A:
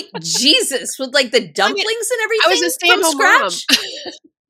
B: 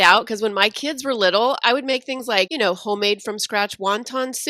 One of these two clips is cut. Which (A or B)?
B